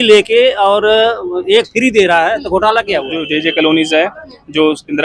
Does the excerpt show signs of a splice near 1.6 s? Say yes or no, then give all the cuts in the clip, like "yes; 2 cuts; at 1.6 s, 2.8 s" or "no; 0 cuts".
no; 1 cut; at 3.3 s